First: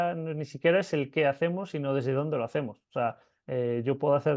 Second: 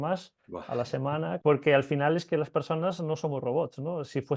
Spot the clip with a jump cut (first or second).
second